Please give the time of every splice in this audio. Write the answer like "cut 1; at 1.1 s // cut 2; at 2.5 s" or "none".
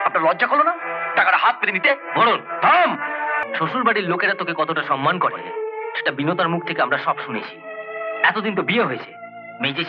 cut 1; at 3.4 s